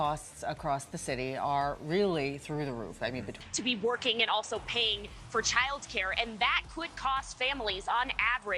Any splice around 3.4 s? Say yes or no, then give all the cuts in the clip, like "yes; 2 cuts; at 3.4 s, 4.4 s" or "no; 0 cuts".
yes; 1 cut; at 3.4 s